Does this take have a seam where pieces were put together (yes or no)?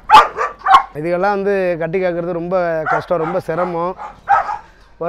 yes